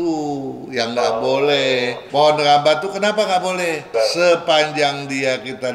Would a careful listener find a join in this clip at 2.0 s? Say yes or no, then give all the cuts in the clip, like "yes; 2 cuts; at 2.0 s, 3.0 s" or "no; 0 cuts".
yes; 1 cut; at 2.0 s